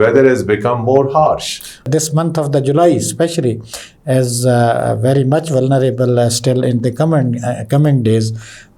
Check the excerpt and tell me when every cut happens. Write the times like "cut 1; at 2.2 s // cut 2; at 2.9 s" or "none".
cut 1; at 1.9 s